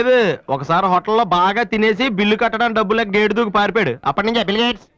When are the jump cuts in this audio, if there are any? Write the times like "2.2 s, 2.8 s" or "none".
none